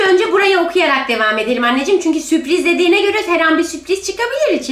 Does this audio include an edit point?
no; 0 cuts

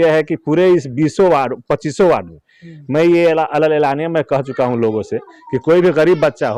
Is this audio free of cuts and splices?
yes; 0 cuts

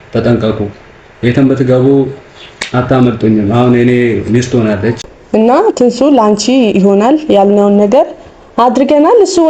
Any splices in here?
yes; 1 cut; at 5.2 s

